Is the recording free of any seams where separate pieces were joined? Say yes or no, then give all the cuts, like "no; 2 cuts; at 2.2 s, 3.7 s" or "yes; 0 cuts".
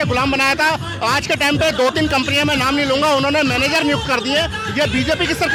yes; 0 cuts